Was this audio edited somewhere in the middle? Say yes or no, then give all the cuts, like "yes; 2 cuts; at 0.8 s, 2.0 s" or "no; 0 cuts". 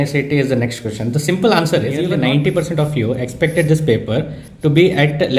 yes; 1 cut; at 2.2 s